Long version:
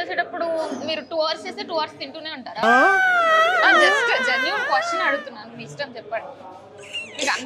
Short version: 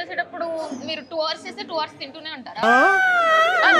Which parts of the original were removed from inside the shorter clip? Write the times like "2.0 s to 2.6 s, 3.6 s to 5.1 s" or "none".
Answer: none